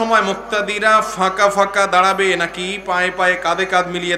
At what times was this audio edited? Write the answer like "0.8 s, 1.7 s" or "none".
none